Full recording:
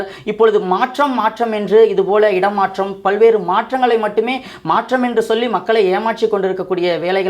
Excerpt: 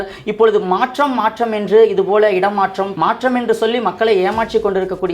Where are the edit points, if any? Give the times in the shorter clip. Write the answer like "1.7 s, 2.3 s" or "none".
2.9 s